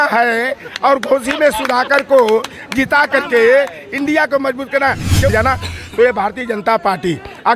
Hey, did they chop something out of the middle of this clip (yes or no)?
yes